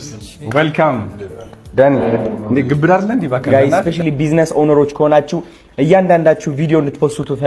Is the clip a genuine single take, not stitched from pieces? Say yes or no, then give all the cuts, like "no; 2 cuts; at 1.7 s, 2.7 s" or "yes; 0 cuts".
no; 1 cut; at 3.4 s